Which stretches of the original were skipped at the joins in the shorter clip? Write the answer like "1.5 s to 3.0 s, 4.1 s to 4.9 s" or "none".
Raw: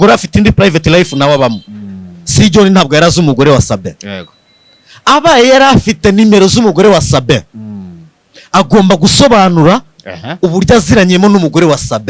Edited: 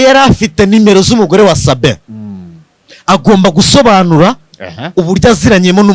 none